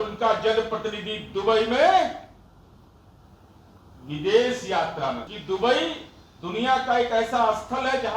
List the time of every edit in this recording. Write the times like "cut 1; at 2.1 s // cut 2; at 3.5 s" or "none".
cut 1; at 5.3 s